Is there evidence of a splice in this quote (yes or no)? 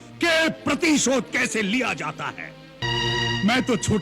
yes